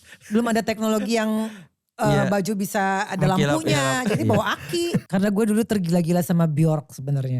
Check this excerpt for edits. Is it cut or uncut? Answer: cut